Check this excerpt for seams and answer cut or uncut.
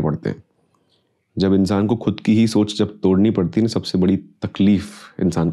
uncut